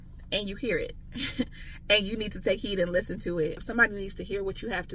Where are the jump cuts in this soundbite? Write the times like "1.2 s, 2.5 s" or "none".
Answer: 3.6 s